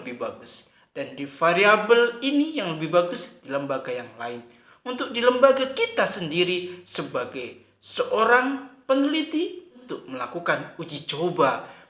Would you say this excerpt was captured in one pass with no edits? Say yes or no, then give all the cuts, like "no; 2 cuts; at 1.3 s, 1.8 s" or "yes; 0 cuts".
no; 1 cut; at 9.8 s